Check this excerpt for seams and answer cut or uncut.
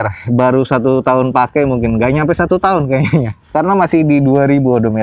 uncut